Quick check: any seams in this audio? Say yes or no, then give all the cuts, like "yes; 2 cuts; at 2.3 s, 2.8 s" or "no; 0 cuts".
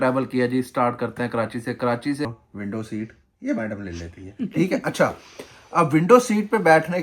yes; 1 cut; at 2.3 s